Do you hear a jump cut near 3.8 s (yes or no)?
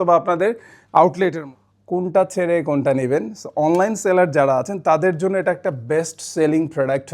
no